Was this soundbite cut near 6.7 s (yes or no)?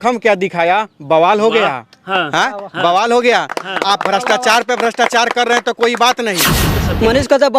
yes